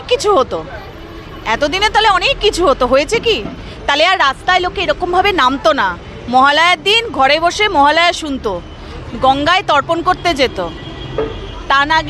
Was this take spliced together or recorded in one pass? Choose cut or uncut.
uncut